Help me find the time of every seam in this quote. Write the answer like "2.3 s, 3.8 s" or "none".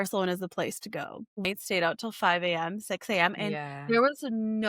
1.4 s